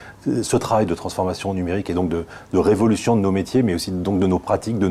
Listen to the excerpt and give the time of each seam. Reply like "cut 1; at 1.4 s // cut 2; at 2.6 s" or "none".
none